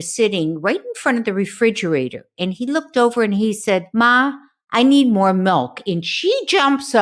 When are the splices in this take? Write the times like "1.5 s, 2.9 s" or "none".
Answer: 3.9 s